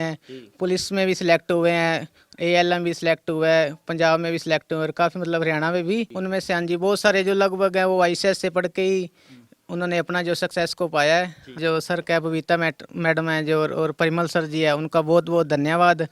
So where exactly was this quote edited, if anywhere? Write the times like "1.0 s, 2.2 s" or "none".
6.1 s, 11.6 s